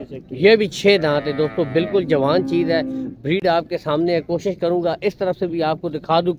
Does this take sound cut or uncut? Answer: uncut